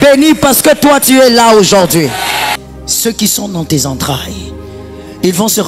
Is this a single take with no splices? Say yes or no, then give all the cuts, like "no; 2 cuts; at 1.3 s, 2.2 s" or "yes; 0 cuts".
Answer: no; 1 cut; at 2.5 s